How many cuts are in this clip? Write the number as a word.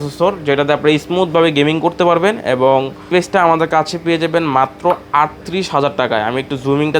one